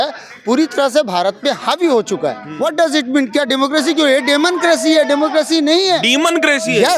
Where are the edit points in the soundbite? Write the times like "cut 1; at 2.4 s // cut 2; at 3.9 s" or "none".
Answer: cut 1; at 2.4 s